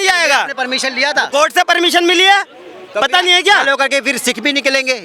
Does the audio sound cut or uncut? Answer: uncut